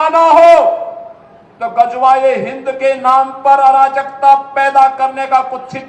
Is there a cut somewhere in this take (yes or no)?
no